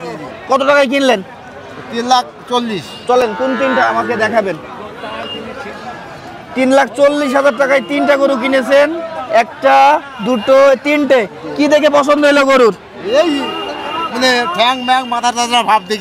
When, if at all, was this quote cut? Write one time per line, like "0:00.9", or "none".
none